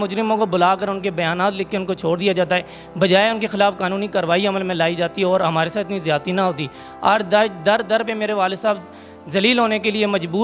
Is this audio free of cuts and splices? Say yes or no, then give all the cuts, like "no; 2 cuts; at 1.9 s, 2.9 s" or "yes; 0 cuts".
yes; 0 cuts